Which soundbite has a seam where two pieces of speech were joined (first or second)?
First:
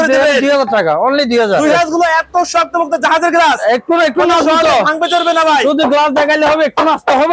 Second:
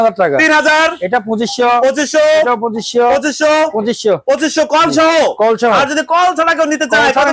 first